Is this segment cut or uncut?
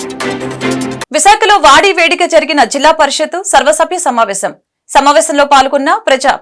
uncut